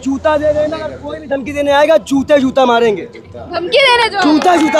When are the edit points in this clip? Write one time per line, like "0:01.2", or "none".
none